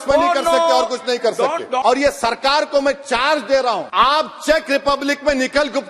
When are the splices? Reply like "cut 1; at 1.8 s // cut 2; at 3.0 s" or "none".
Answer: cut 1; at 1.8 s // cut 2; at 3.9 s